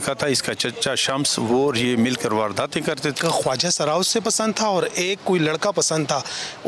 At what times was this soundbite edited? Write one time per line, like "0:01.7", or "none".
0:03.2